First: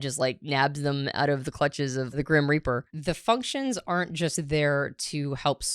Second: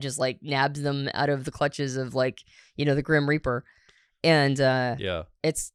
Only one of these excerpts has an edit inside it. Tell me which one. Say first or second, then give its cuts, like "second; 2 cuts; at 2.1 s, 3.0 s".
first; 2 cuts; at 2.2 s, 2.9 s